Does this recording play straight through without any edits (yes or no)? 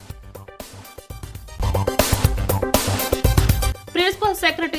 no